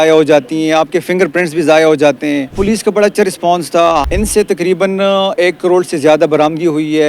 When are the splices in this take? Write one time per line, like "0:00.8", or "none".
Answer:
0:02.6
0:04.1

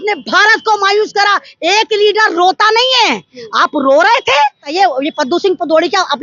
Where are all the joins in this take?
0:04.7

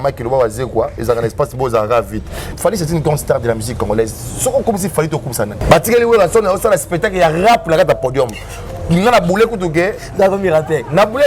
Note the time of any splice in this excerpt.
0:02.4
0:05.6

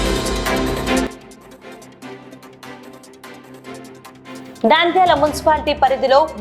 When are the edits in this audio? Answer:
0:01.1
0:04.1

